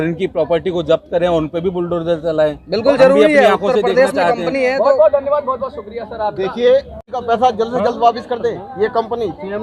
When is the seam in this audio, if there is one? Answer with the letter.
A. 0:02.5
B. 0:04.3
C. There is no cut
C